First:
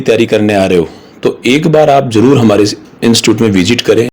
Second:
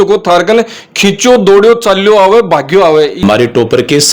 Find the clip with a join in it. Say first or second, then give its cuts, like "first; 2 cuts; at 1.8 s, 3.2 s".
second; 1 cut; at 3.2 s